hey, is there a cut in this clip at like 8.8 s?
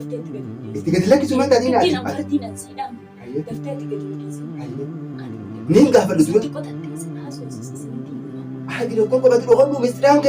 yes; 2 cuts; at 6.8 s, 8.8 s

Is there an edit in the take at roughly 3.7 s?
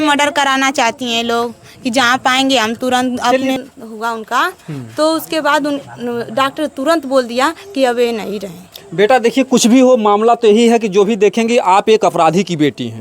yes; 1 cut; at 3.7 s

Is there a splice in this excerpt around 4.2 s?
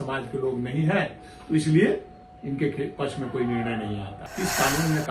yes; 1 cut; at 4.2 s

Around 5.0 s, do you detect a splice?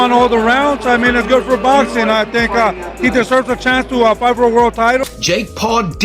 yes; 1 cut; at 5.0 s

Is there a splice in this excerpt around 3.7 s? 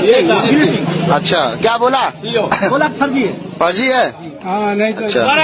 no; 0 cuts

